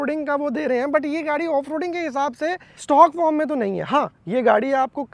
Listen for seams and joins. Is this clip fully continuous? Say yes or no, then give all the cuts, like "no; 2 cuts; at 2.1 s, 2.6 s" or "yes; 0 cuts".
yes; 0 cuts